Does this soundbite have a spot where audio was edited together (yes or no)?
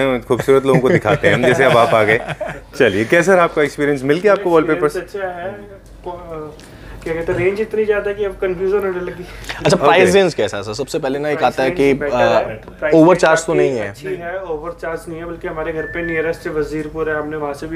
no